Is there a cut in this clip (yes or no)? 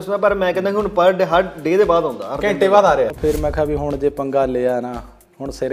yes